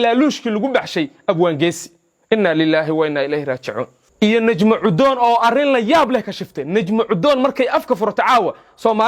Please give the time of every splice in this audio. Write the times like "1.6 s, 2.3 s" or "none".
4.0 s

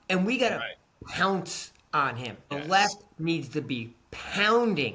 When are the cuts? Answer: 2.5 s

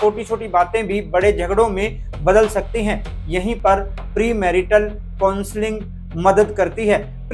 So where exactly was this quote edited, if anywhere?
none

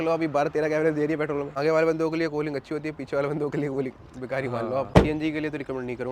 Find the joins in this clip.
1.5 s, 4.9 s

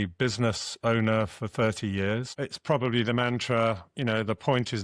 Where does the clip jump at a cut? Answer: 2.3 s

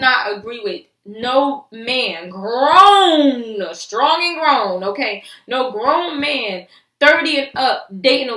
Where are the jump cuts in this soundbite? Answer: none

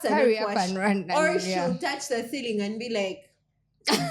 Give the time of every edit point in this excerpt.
none

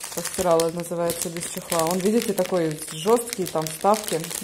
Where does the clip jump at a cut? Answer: none

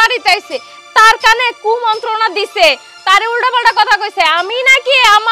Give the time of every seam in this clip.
none

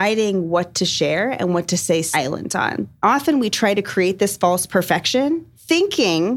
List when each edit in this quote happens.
2.9 s, 5.2 s

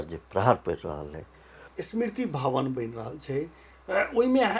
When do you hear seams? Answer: 1.7 s

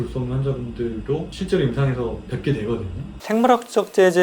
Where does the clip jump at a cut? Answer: 1.4 s, 3.0 s

